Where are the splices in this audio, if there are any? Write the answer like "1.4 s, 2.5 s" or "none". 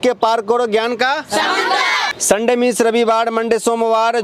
2.1 s